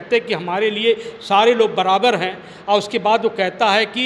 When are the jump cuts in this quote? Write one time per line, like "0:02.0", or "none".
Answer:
none